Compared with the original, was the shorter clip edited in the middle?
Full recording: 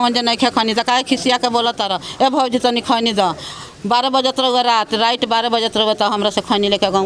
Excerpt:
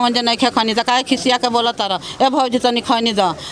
no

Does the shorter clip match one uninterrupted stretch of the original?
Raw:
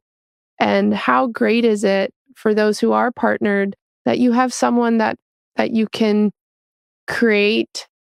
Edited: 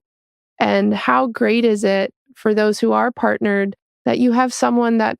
yes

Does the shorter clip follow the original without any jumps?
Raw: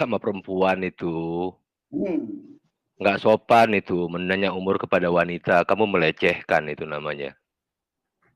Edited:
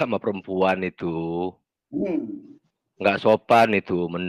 yes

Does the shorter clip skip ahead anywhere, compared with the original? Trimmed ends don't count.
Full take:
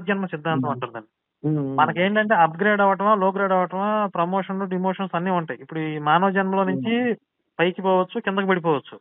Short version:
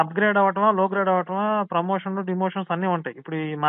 no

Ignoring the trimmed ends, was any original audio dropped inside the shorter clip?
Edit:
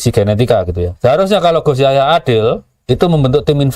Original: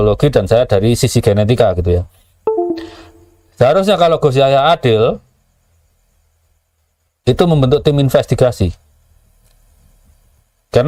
yes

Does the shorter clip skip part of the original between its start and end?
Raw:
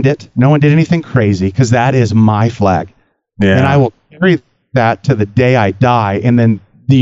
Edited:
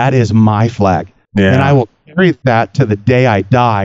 yes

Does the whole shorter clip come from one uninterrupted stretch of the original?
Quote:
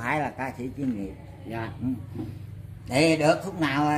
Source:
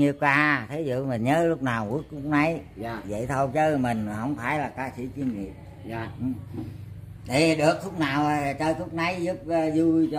yes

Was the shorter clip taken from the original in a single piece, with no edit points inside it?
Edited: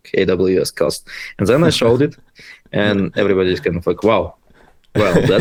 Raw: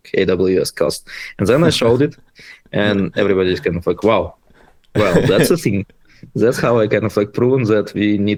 yes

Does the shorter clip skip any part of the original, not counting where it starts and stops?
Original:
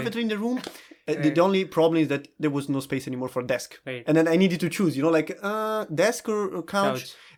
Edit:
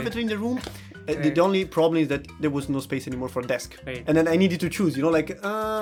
no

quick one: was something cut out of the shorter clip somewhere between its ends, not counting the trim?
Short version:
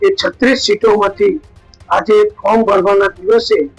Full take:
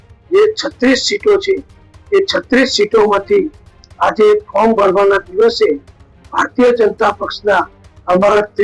no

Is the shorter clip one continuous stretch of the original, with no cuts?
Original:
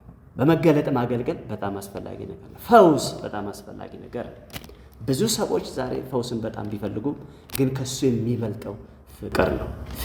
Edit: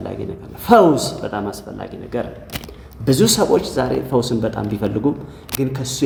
yes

